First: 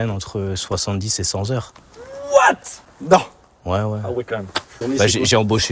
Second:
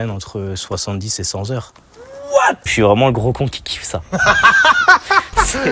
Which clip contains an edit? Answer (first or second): second